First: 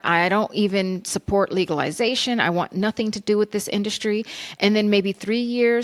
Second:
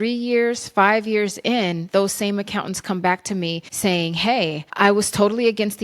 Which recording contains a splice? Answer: second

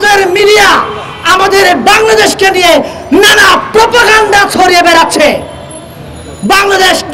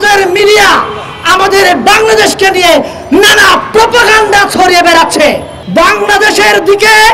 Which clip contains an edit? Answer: second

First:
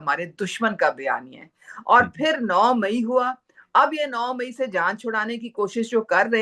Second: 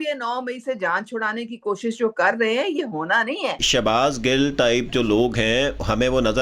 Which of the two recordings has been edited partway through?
second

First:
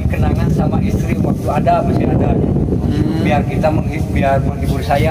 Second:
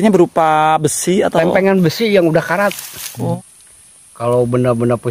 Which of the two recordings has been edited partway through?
second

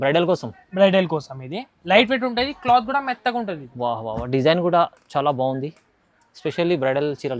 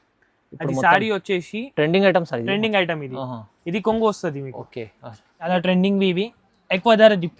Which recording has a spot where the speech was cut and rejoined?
second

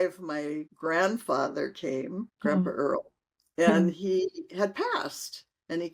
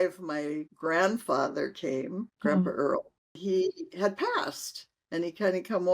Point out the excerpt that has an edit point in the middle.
second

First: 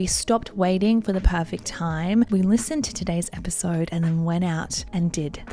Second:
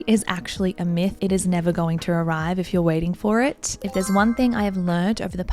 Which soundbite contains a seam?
second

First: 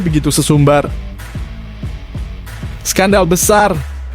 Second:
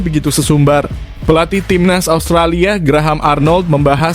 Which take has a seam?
first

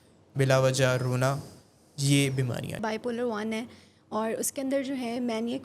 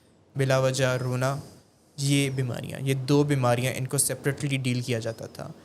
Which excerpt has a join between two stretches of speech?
first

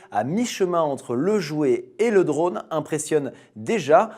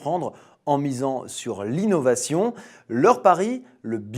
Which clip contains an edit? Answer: second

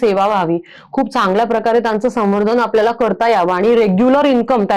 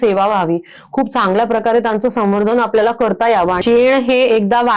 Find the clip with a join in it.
second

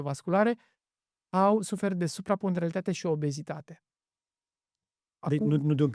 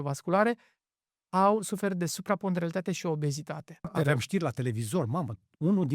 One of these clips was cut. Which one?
second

